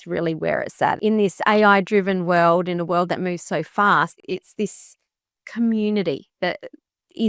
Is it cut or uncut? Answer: cut